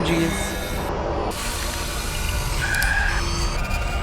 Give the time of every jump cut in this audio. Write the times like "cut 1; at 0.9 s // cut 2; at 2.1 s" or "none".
cut 1; at 1.3 s